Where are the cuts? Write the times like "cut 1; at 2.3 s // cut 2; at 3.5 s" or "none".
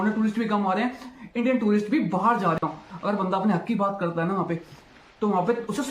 cut 1; at 2.6 s